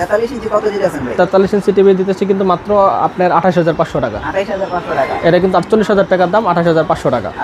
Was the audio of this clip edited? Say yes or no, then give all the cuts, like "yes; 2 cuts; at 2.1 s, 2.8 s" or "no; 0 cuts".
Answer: no; 0 cuts